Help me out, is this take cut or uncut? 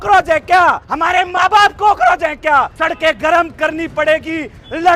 cut